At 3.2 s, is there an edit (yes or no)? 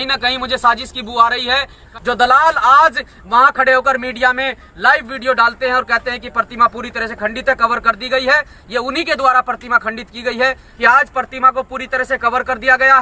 no